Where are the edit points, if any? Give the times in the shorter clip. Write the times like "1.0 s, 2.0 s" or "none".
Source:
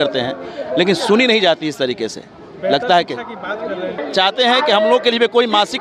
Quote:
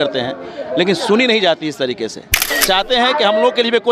2.4 s